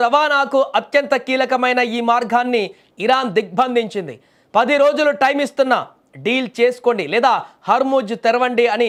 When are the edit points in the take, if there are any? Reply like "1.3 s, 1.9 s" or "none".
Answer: none